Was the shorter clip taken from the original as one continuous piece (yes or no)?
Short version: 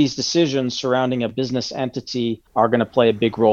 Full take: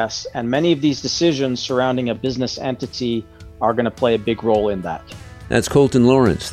no